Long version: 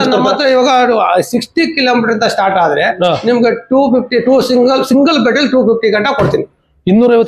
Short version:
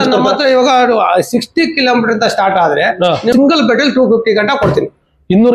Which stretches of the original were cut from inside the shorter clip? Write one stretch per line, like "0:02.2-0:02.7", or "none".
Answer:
0:03.3-0:04.9